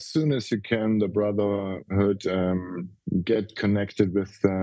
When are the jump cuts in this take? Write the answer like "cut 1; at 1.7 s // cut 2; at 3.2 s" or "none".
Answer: none